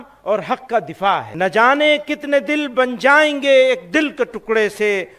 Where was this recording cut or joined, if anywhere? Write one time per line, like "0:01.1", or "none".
0:01.3